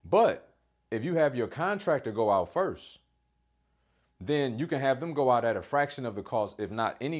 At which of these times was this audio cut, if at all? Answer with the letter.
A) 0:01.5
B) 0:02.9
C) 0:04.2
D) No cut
D